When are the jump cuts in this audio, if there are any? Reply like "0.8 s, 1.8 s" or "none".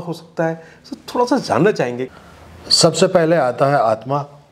2.1 s

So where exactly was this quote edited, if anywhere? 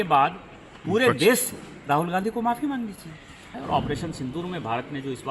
3.6 s

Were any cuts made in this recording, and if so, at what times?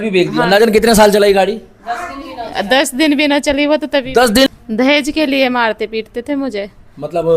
4.5 s

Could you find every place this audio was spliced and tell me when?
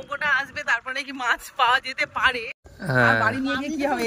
2.7 s

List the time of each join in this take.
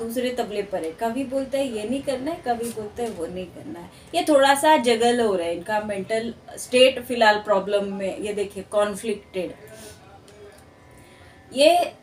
none

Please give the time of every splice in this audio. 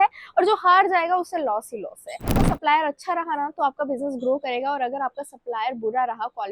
2.4 s

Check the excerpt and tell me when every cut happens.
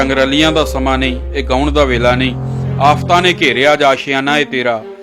none

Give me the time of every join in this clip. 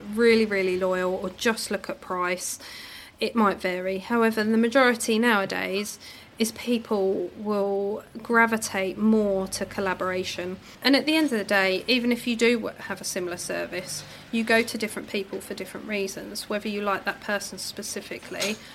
10.7 s

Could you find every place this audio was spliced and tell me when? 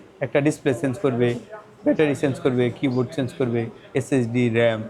none

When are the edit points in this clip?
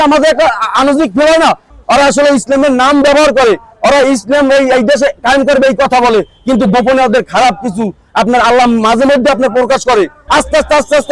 1.7 s, 10.2 s

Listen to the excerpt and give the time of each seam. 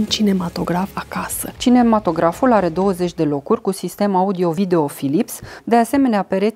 none

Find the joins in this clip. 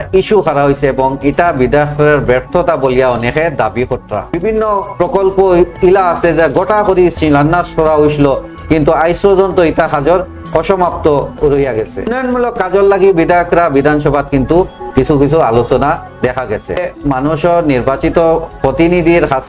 4.3 s, 12.1 s, 16.8 s

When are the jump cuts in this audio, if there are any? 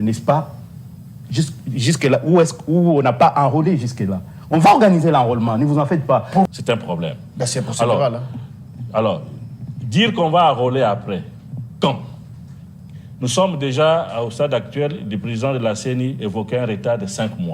6.5 s

